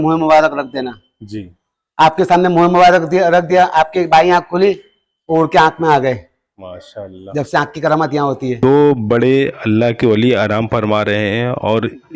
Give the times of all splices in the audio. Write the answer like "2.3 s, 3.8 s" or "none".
8.6 s